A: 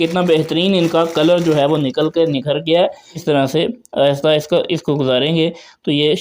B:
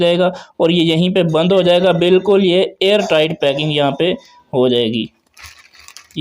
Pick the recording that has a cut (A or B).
A